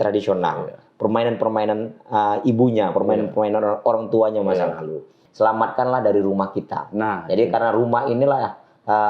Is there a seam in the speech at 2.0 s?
no; 1 cut; at 5.2 s

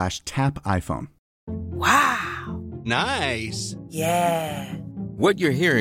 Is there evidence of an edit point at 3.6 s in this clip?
no; 1 cut; at 1.3 s

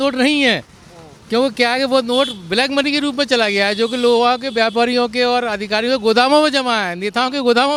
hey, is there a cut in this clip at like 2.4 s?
no; 0 cuts

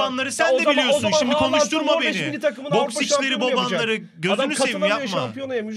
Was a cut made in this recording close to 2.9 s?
no; 0 cuts

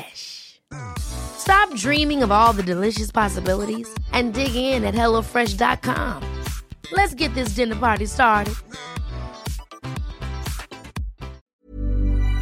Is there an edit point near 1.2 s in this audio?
no; 1 cut; at 11.4 s

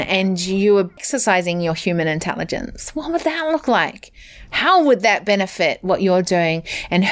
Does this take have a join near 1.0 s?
yes; 1 cut; at 1.0 s

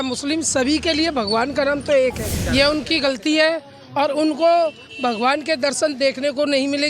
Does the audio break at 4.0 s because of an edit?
no; 1 cut; at 2.4 s

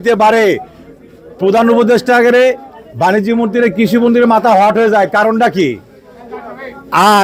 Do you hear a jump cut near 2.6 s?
no; 0 cuts

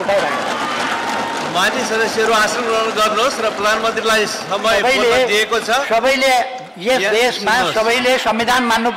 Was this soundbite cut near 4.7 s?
no; 0 cuts

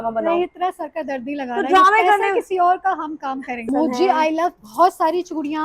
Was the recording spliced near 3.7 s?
yes; 1 cut; at 3.7 s

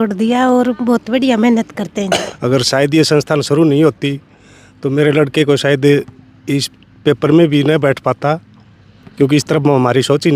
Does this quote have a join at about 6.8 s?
no; 1 cut; at 2.3 s

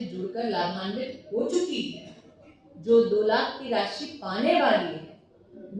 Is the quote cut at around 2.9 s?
no; 0 cuts

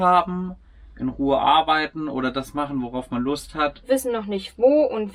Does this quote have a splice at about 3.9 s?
yes; 1 cut; at 3.9 s

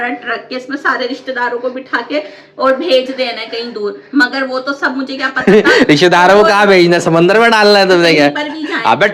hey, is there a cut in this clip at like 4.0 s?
no; 0 cuts

